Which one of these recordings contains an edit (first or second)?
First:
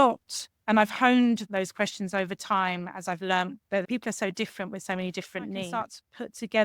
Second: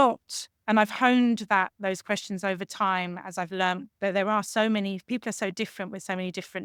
first